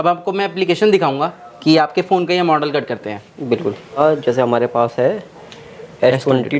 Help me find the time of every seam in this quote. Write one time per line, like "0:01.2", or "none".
0:04.0